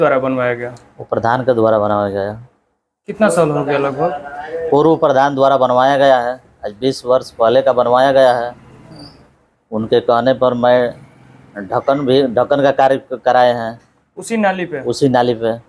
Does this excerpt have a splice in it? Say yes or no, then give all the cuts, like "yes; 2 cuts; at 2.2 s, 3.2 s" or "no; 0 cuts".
no; 0 cuts